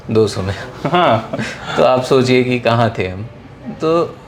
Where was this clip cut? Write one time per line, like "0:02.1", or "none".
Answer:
none